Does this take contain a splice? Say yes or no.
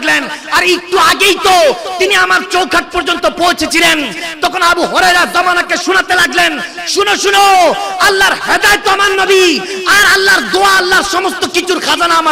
no